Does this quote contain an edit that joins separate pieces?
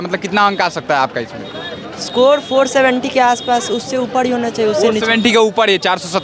no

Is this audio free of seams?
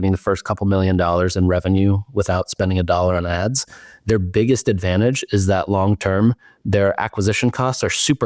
yes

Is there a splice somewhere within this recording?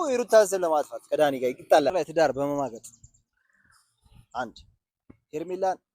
yes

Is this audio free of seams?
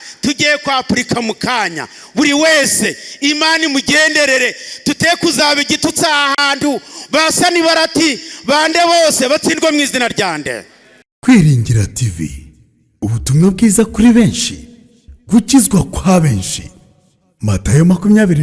no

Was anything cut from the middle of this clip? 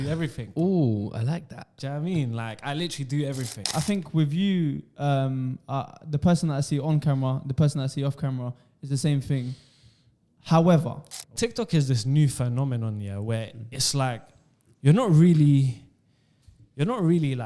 yes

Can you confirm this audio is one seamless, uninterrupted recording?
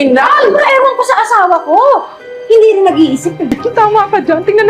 no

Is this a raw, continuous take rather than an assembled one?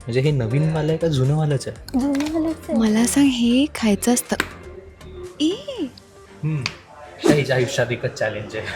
no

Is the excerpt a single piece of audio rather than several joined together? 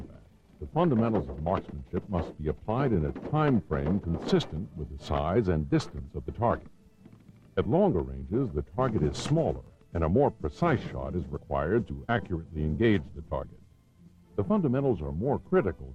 no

